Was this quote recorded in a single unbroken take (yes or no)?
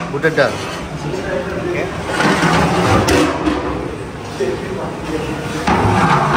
yes